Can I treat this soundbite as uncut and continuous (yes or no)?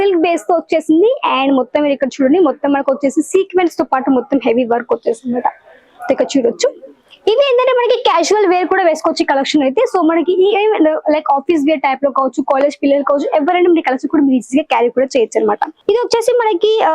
no